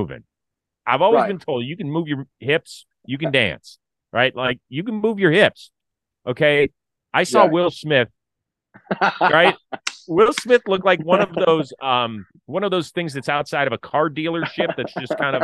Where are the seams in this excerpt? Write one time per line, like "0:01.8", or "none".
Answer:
none